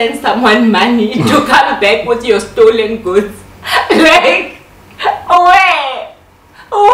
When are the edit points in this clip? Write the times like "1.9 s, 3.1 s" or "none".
none